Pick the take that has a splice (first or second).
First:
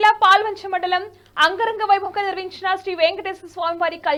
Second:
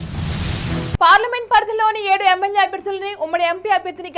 second